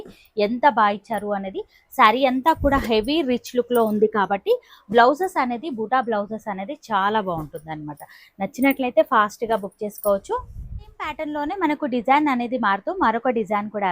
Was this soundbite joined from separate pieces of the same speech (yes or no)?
no